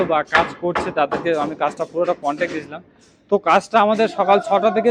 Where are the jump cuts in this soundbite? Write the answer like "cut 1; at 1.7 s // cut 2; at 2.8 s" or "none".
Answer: none